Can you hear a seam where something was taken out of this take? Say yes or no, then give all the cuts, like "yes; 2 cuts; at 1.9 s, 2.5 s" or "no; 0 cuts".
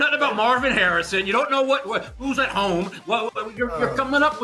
no; 0 cuts